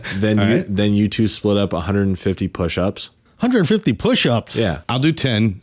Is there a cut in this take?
no; 0 cuts

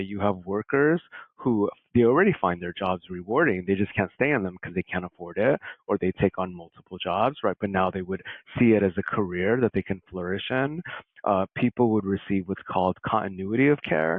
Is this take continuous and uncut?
yes; 0 cuts

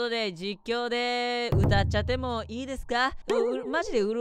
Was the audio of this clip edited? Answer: yes; 1 cut; at 3.2 s

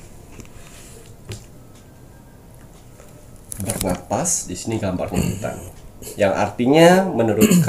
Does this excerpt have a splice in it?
no; 0 cuts

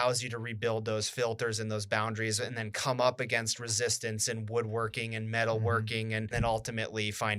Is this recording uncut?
no; 1 cut; at 6.3 s

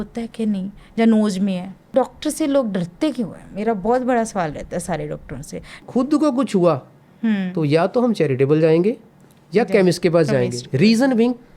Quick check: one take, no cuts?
no; 2 cuts; at 1.9 s, 5.8 s

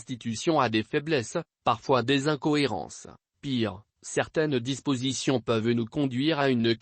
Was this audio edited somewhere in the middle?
yes; 1 cut; at 4.1 s

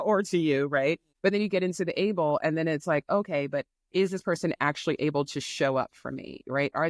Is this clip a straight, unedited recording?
no; 1 cut; at 1.1 s

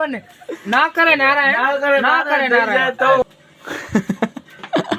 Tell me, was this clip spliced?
yes; 1 cut; at 3.2 s

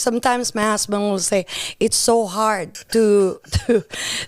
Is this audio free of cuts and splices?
no; 1 cut; at 2.7 s

